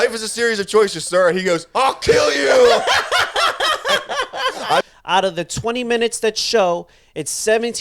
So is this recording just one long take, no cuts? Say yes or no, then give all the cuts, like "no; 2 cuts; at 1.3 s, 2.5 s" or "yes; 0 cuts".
no; 1 cut; at 4.8 s